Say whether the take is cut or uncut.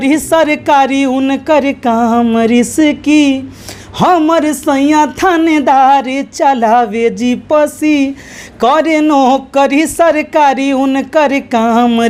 uncut